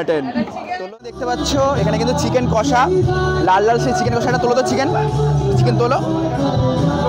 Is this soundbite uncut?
no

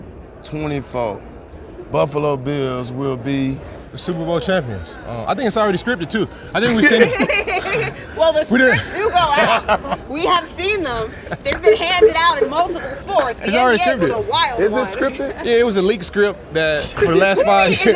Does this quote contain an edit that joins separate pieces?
yes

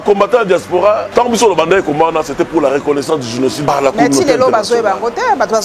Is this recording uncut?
no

